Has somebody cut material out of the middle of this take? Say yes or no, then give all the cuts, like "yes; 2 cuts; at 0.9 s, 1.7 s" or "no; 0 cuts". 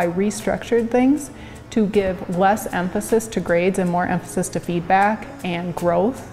no; 0 cuts